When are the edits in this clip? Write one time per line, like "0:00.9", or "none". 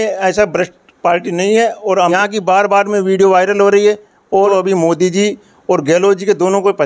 0:02.1
0:04.5